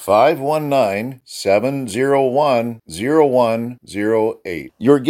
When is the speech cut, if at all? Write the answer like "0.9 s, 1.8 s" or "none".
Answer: none